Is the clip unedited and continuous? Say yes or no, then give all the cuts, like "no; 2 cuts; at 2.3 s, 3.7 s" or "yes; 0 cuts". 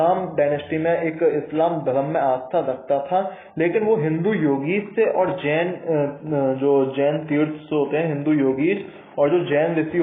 yes; 0 cuts